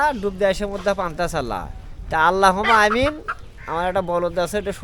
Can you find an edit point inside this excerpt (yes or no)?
no